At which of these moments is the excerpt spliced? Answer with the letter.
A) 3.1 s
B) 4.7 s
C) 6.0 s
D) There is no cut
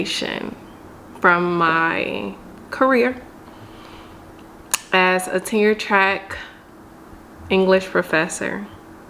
D